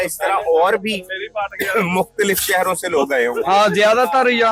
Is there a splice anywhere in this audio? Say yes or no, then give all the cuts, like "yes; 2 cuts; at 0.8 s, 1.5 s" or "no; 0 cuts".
no; 0 cuts